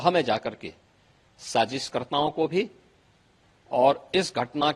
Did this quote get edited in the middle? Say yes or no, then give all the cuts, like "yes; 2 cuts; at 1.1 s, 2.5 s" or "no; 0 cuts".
no; 0 cuts